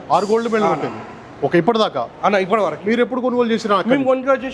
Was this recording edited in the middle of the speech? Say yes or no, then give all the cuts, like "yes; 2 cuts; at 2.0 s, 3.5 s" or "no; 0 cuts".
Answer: no; 0 cuts